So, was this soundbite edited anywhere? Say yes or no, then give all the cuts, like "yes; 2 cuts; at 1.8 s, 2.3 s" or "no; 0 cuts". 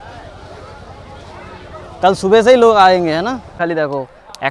yes; 1 cut; at 3.6 s